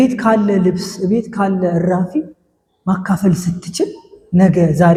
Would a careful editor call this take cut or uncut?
uncut